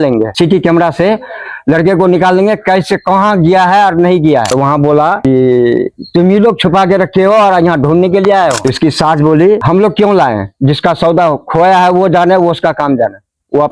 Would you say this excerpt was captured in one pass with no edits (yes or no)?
no